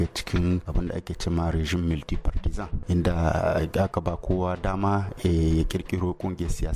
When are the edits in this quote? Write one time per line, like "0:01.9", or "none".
none